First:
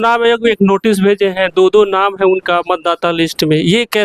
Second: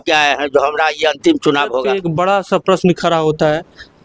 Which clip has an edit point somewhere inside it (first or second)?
second